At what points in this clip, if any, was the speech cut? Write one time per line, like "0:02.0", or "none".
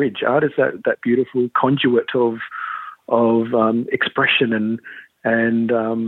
none